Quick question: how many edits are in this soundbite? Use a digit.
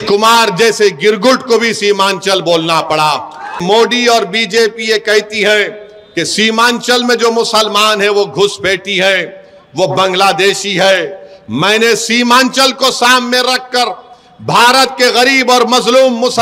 1